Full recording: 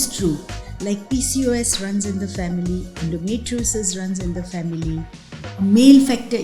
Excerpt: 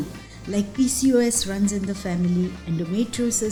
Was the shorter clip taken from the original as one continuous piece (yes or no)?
yes